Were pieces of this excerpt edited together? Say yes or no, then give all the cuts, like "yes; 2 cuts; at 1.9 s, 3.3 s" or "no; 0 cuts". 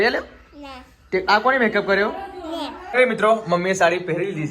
yes; 1 cut; at 2.8 s